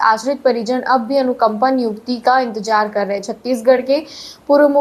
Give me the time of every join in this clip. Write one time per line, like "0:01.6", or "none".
none